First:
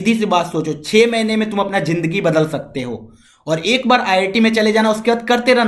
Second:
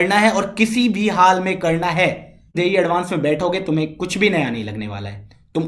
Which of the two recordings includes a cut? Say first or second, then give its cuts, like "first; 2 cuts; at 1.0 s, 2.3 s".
second; 1 cut; at 2.6 s